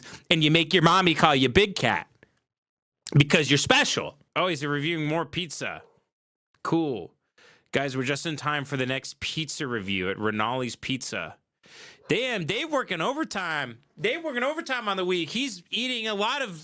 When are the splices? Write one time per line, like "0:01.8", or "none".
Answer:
0:04.2